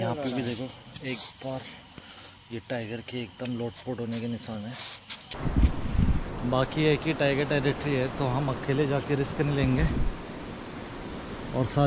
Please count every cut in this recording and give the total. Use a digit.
1